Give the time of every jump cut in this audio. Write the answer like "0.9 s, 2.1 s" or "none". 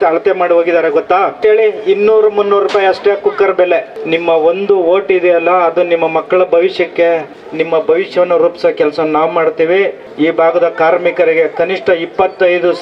1.4 s, 3.9 s, 7.4 s, 10.0 s